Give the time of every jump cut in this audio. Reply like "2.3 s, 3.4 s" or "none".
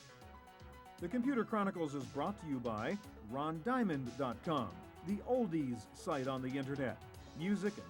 1.0 s